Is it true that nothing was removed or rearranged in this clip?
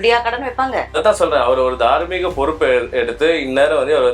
yes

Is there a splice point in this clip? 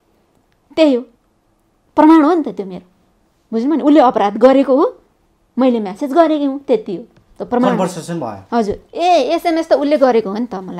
yes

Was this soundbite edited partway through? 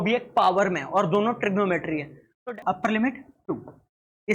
yes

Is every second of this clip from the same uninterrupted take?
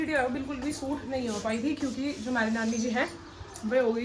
yes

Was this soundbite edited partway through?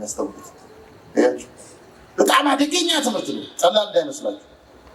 no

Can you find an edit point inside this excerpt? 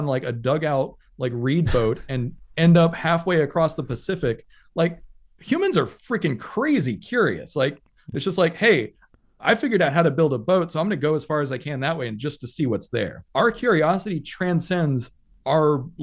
yes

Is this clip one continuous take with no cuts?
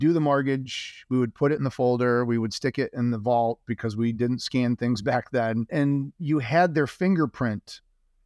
no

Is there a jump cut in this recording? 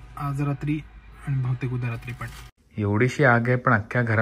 yes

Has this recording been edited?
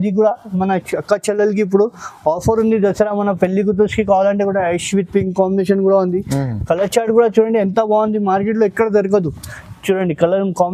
no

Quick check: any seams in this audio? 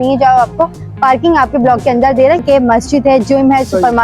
yes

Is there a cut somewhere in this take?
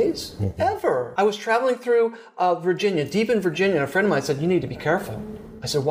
yes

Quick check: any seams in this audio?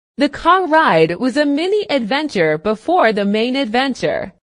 no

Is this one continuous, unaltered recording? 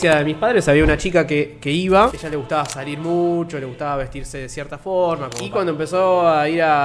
no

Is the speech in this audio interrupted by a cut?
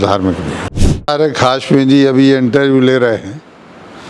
yes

